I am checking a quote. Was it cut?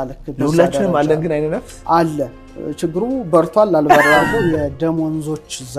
yes; 1 cut; at 4.3 s

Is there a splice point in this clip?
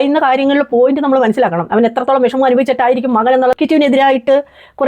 yes; 1 cut; at 3.5 s

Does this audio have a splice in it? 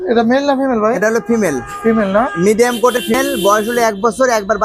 no; 0 cuts

